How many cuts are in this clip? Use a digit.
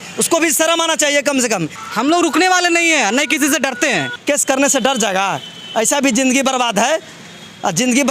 2